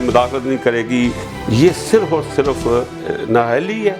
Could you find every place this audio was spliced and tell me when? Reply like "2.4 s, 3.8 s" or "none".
1.3 s, 3.0 s